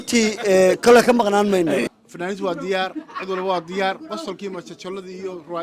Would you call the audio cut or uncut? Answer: cut